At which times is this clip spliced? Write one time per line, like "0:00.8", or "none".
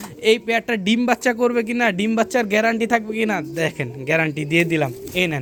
none